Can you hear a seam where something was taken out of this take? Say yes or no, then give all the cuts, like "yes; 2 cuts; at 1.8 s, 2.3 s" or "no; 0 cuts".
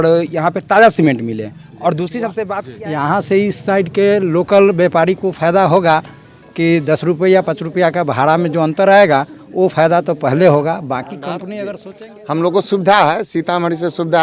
yes; 2 cuts; at 2.6 s, 11.8 s